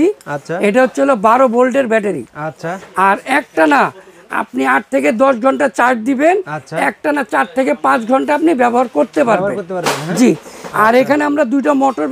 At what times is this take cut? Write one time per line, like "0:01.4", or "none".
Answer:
none